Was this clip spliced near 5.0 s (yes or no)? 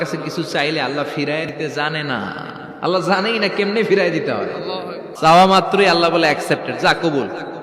yes